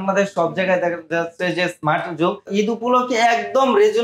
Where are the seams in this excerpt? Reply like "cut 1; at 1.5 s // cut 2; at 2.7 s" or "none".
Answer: cut 1; at 2.5 s